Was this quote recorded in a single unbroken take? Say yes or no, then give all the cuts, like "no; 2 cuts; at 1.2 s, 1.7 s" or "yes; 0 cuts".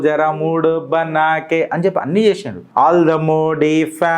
no; 1 cut; at 2.7 s